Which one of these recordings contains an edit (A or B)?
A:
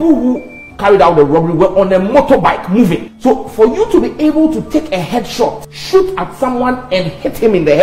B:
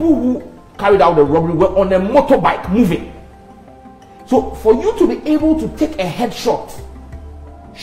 A